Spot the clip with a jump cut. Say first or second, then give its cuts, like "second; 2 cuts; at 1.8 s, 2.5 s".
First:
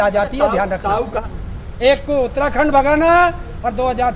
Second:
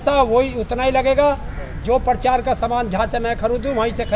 first; 1 cut; at 1.2 s